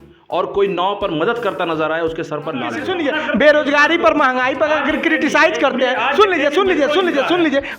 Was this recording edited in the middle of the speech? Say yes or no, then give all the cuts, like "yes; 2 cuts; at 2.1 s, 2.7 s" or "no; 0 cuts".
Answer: yes; 1 cut; at 2.8 s